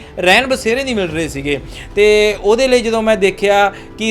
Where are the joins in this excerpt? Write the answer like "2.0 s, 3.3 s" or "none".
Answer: none